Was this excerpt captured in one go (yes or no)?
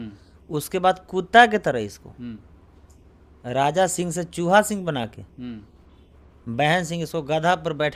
yes